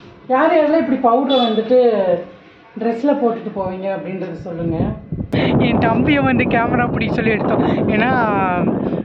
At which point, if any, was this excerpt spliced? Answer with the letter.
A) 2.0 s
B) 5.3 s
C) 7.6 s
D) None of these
B